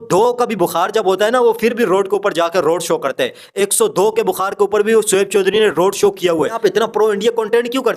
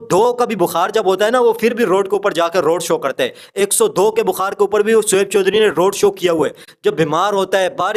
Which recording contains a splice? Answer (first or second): first